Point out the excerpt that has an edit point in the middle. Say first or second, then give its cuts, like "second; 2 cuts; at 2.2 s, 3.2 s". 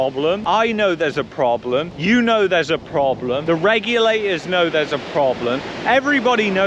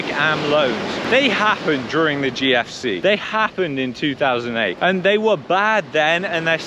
second; 1 cut; at 1.0 s